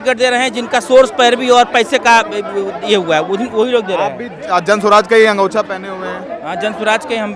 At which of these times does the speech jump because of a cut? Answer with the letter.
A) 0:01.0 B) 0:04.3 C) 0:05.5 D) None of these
D